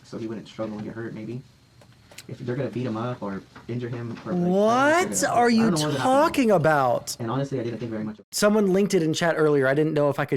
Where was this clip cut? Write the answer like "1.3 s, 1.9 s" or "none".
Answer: 8.2 s